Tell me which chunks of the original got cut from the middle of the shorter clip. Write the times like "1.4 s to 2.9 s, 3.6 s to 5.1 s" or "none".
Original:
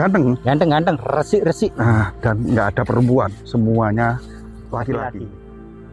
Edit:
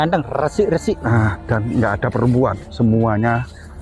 none